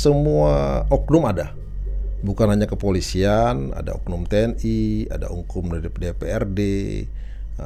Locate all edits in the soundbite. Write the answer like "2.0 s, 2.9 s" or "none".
none